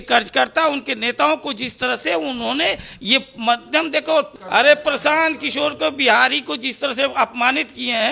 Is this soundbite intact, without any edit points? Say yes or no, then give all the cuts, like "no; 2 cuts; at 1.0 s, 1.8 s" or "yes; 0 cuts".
no; 1 cut; at 4.4 s